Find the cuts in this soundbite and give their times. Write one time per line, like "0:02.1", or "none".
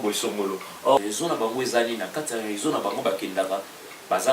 0:01.0